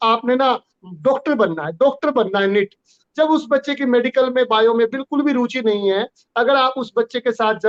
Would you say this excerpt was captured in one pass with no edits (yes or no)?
yes